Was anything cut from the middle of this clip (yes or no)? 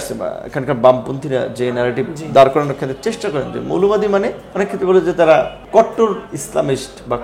yes